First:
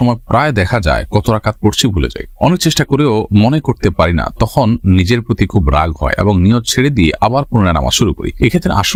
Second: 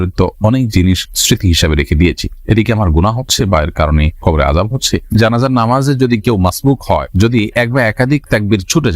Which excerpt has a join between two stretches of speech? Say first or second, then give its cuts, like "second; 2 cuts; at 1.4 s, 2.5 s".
second; 1 cut; at 5.1 s